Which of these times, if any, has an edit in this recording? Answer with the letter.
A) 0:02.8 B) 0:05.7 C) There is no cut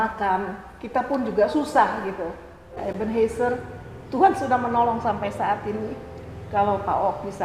A